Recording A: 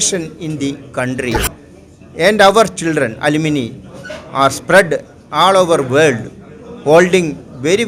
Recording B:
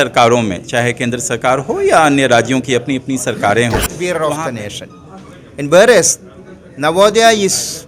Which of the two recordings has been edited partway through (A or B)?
B